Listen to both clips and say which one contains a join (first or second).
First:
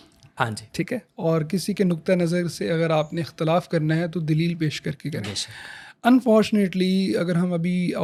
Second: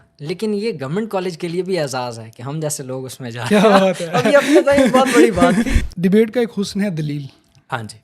second